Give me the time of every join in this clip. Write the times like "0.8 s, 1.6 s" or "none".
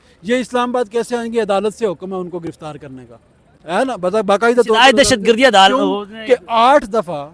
none